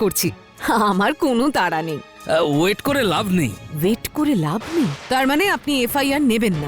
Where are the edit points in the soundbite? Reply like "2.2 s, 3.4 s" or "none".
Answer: 2.0 s, 3.6 s, 5.0 s